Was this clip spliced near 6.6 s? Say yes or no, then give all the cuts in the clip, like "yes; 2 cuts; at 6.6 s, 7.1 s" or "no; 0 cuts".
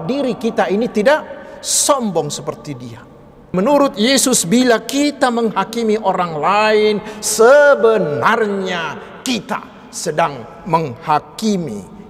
no; 1 cut; at 3.5 s